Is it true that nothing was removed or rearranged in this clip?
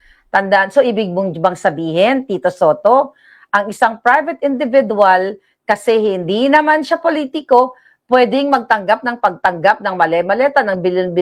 yes; 0 cuts

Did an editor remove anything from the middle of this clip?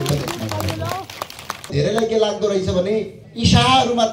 yes; 2 cuts; at 1.7 s, 3.2 s

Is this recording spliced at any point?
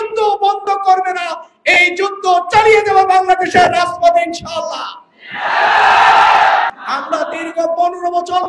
yes; 1 cut; at 6.8 s

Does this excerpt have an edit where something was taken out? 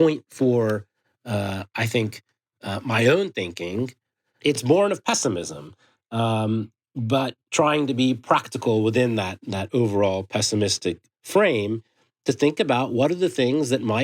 yes; 3 cuts; at 4.6 s, 7.4 s, 11.1 s

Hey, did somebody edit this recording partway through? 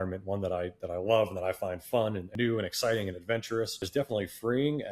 yes; 2 cuts; at 2.2 s, 3.8 s

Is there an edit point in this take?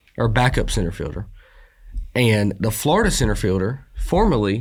no; 0 cuts

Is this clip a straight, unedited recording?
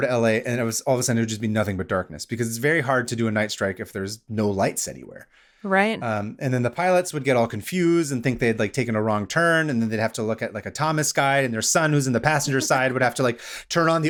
yes; 0 cuts

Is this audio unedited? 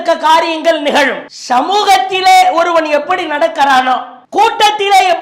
yes; 0 cuts

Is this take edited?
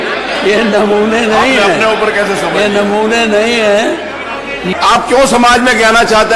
yes; 1 cut; at 4.7 s

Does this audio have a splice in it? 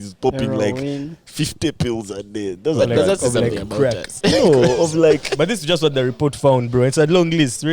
yes; 1 cut; at 4.1 s

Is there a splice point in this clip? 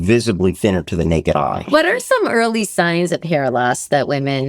yes; 1 cut; at 1.6 s

